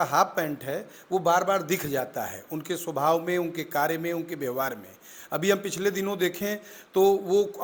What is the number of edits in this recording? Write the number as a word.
zero